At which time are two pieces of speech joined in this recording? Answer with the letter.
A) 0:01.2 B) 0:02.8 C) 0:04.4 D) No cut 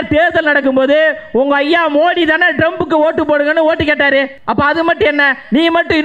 C